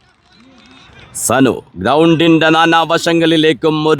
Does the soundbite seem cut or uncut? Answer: cut